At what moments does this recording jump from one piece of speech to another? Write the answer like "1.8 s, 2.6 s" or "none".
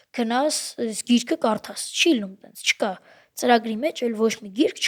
none